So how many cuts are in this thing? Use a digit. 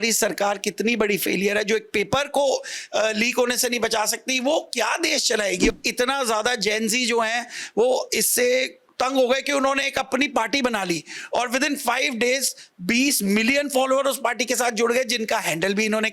1